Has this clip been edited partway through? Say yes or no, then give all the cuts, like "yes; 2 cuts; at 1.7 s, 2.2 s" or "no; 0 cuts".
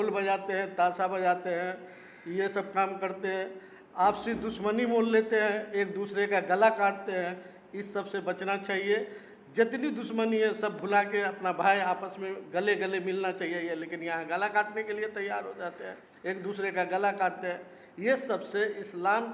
no; 0 cuts